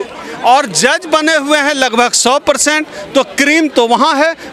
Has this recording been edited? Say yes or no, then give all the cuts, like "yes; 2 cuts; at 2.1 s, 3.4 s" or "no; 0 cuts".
no; 0 cuts